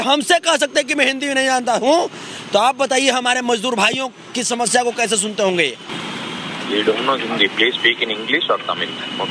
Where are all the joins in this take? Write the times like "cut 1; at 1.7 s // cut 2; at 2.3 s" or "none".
none